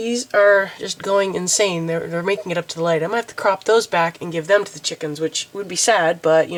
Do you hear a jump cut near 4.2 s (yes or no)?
no